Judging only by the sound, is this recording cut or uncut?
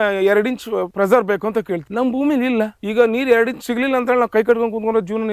cut